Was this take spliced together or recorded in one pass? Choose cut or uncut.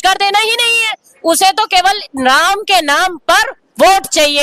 uncut